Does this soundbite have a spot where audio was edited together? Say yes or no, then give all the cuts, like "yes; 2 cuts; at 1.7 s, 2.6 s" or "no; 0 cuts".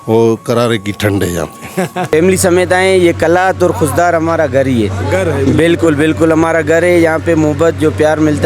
yes; 1 cut; at 2.1 s